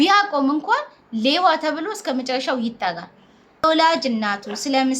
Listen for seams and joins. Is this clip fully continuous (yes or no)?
no